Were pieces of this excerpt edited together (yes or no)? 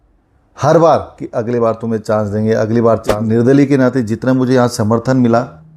yes